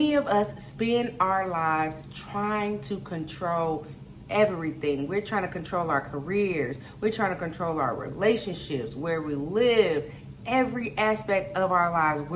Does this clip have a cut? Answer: no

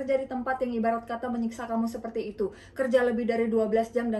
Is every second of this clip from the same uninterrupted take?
yes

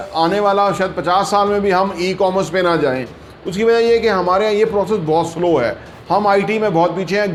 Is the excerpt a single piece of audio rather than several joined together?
yes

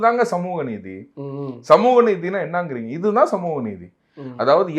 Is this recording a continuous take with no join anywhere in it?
yes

